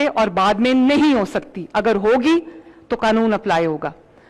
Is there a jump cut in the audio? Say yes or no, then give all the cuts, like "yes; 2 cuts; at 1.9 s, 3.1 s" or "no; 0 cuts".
no; 0 cuts